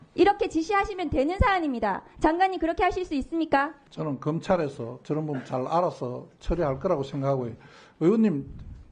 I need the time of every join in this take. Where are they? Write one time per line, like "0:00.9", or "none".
0:03.8